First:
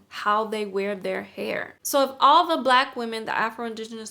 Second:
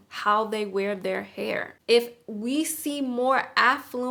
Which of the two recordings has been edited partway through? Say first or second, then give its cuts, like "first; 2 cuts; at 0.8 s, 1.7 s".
first; 1 cut; at 1.7 s